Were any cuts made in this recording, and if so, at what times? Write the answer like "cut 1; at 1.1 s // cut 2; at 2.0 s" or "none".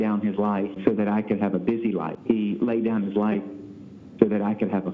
cut 1; at 0.8 s // cut 2; at 2.1 s